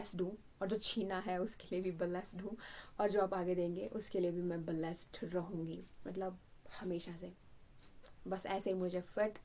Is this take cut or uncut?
uncut